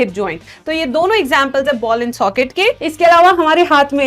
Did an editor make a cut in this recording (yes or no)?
yes